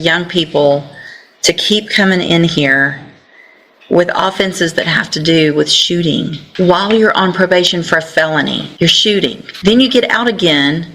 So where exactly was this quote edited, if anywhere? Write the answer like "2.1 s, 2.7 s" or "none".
6.4 s, 8.7 s, 9.5 s